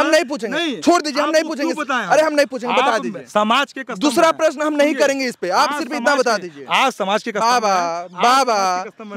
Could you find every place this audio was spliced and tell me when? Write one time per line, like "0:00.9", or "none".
none